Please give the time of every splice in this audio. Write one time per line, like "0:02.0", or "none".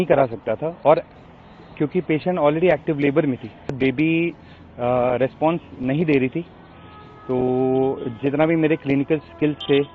0:03.8